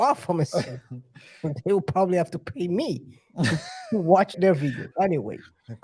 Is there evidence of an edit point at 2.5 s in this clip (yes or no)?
no